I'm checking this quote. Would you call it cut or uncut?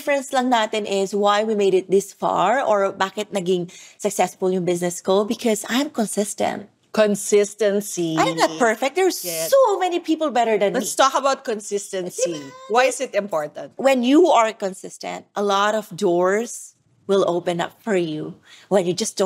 cut